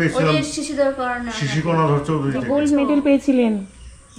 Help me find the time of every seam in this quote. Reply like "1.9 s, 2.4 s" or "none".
2.4 s